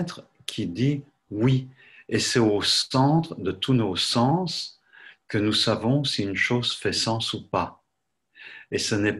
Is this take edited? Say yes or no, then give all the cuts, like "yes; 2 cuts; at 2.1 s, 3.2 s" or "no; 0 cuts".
no; 0 cuts